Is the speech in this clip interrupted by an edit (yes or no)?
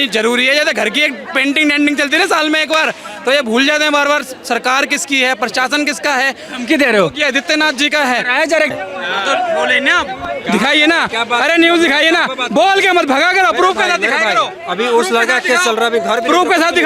yes